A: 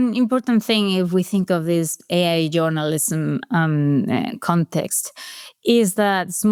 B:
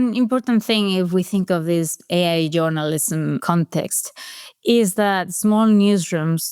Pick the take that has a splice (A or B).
B